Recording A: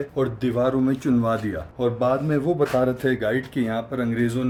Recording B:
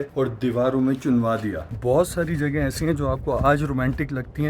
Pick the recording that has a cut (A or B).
B